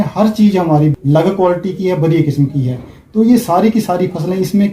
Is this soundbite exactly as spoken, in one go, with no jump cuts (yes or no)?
no